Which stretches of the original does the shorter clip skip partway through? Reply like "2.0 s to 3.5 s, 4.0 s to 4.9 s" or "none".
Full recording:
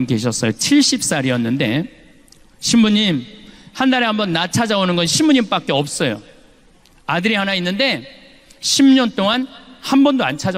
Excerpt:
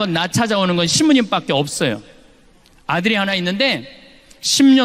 none